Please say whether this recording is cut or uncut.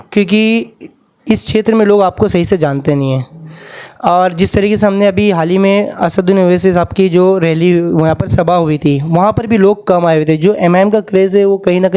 uncut